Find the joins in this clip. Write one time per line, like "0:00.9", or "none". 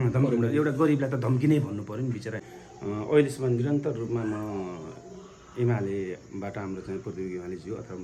0:02.4